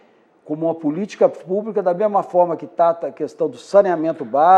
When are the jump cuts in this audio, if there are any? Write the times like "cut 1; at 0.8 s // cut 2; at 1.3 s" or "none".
none